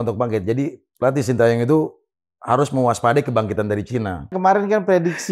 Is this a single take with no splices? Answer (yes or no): no